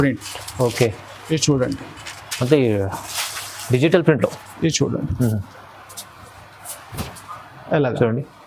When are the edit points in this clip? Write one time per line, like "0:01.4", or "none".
none

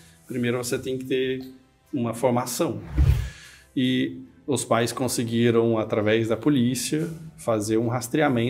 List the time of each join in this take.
0:03.0

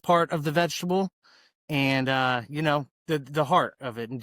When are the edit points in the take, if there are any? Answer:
0:02.9

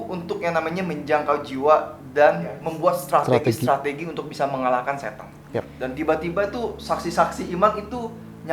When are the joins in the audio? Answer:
0:02.6
0:05.7

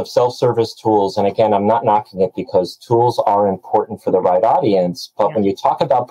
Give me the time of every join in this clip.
none

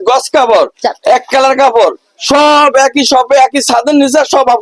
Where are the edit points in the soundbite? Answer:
none

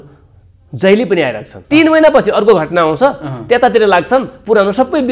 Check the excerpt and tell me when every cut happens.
0:01.5

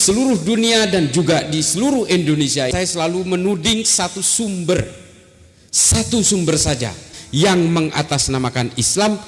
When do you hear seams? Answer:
0:02.7
0:07.2

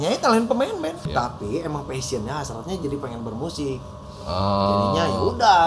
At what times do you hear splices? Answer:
0:01.0

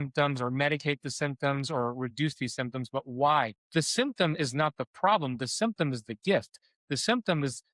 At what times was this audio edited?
0:03.6

